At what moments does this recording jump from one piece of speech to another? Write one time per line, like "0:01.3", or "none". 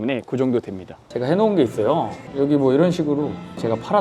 0:01.0

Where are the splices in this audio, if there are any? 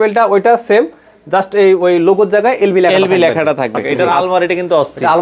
0:03.9

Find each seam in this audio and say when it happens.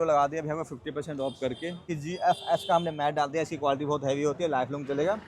0:01.8

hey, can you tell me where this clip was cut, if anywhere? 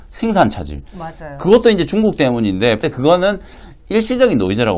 0:02.8

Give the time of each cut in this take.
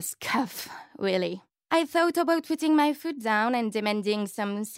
0:01.5

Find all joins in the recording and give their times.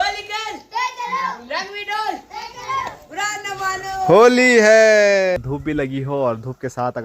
0:05.4

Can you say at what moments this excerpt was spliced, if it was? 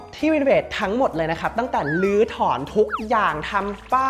none

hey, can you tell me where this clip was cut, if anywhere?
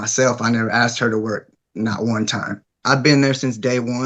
0:02.7

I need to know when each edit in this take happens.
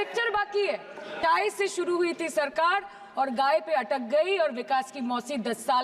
0:01.1

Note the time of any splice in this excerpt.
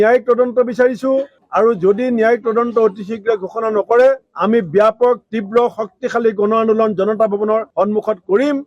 0:01.4

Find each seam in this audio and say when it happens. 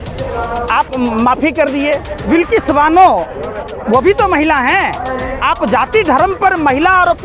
0:02.1

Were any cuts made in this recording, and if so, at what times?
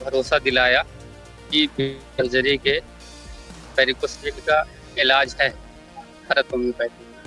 none

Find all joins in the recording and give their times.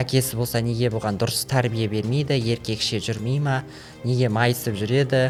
none

